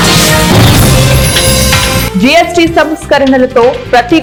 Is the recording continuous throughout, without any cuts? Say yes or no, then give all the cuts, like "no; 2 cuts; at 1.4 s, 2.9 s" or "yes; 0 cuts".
yes; 0 cuts